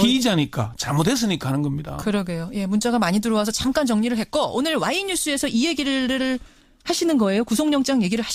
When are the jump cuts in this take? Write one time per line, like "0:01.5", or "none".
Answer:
none